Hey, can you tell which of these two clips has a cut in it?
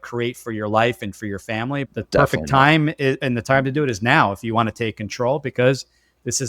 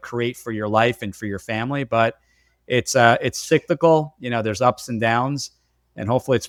first; 1 cut; at 1.9 s

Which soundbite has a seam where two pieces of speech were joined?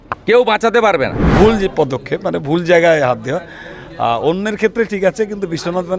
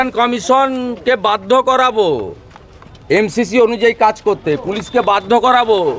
first; 1 cut; at 1.2 s

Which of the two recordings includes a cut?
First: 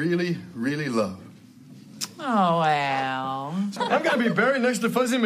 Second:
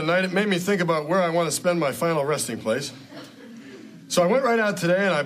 first; 1 cut; at 3.7 s

